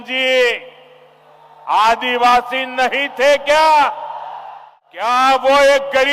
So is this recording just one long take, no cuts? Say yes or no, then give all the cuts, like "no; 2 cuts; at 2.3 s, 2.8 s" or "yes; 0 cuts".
no; 1 cut; at 5.1 s